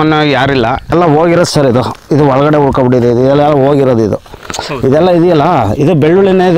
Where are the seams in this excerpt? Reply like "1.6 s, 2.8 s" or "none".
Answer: 0.9 s